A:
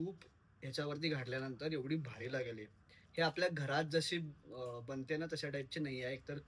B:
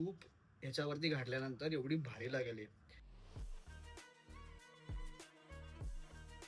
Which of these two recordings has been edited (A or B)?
B